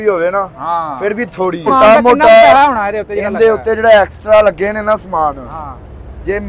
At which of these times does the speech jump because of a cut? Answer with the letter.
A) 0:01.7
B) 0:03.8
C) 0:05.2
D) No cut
A